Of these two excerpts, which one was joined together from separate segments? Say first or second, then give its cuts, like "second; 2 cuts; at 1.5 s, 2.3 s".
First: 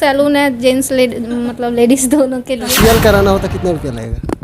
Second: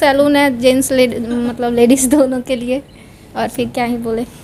first; 1 cut; at 2.7 s